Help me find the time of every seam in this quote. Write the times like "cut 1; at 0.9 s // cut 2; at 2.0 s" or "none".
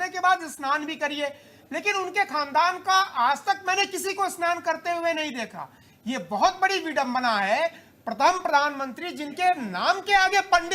none